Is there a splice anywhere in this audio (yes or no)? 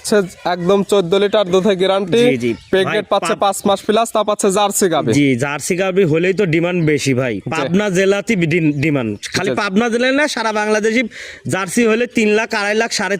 no